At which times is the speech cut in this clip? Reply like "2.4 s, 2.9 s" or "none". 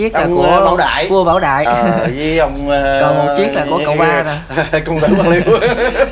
none